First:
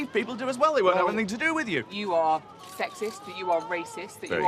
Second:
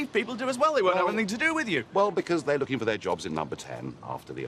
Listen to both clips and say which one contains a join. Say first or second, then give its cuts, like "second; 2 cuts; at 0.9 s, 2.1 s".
first; 1 cut; at 1.9 s